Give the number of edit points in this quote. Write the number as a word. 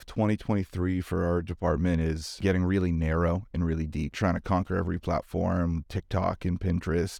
three